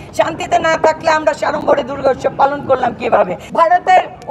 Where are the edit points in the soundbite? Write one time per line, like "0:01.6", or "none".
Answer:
0:03.4